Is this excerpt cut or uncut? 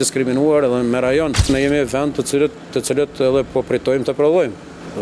cut